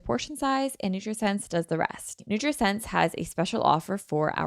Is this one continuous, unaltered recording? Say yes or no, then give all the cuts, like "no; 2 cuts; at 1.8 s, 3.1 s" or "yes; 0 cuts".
no; 1 cut; at 2.1 s